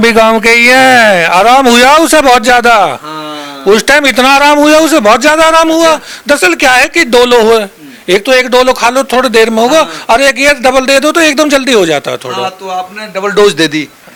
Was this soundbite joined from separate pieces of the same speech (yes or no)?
no